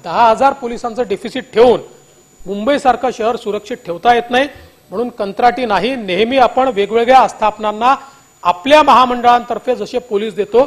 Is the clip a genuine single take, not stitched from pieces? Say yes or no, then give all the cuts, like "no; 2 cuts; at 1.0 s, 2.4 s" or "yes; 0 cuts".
yes; 0 cuts